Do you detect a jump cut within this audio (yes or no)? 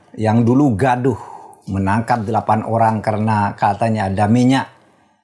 no